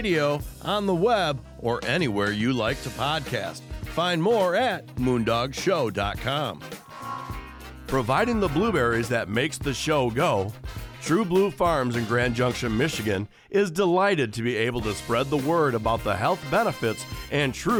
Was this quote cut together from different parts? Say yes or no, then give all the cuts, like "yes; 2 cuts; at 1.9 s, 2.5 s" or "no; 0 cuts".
no; 0 cuts